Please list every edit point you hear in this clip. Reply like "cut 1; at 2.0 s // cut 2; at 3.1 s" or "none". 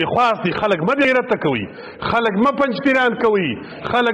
cut 1; at 1.0 s